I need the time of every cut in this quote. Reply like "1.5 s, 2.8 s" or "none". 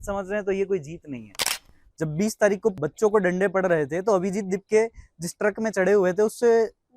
1.4 s, 2.8 s